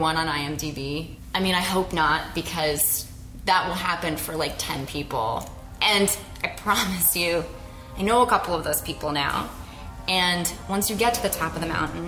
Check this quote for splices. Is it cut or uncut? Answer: cut